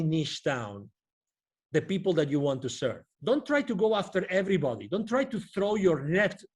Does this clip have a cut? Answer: yes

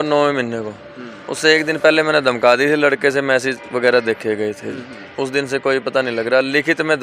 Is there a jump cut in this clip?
no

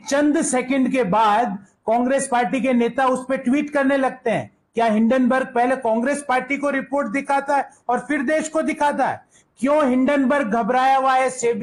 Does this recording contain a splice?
no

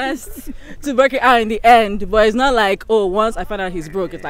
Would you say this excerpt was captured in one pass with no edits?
yes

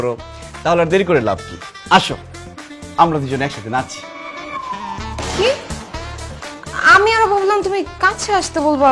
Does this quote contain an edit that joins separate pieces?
no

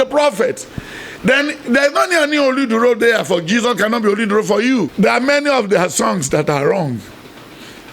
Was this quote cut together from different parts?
yes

